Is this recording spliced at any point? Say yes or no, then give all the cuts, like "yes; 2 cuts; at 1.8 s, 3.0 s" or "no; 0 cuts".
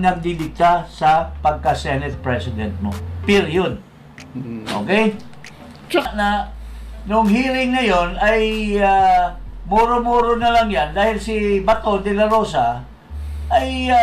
yes; 1 cut; at 6.1 s